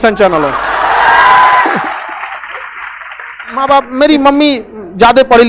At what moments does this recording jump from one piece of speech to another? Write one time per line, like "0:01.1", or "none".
0:03.6